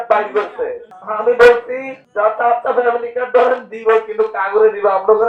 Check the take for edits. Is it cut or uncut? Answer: uncut